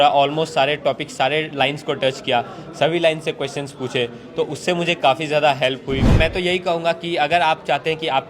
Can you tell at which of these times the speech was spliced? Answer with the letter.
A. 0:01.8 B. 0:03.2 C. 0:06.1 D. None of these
C